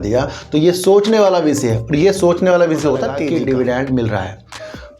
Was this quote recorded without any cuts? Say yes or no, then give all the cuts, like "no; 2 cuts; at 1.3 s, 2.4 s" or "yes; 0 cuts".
no; 1 cut; at 3.2 s